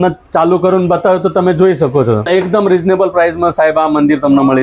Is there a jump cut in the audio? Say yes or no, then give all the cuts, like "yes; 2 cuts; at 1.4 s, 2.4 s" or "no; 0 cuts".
yes; 1 cut; at 2.3 s